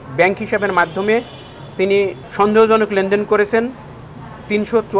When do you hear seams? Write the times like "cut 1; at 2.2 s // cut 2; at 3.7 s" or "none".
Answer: cut 1; at 2.2 s